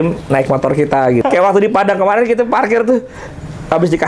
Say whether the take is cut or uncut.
cut